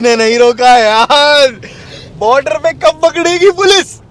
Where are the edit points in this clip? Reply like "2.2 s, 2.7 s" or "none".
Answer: none

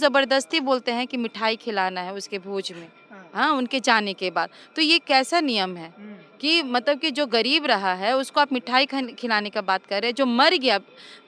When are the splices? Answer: none

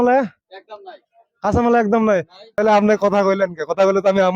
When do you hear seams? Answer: 2.4 s

